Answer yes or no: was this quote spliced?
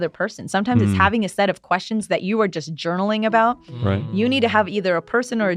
no